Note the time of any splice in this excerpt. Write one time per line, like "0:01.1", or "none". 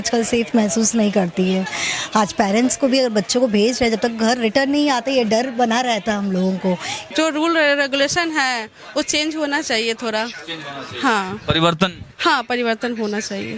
0:07.0